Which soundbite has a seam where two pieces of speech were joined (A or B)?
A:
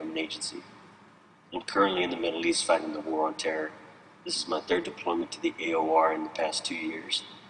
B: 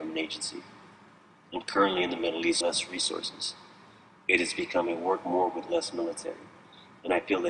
A